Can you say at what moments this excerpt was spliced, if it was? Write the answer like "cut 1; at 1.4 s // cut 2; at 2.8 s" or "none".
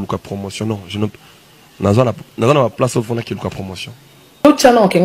none